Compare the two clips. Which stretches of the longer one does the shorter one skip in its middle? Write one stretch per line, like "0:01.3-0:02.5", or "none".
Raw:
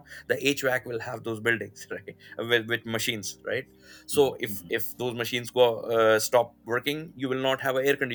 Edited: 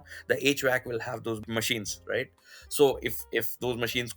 0:01.4-0:02.8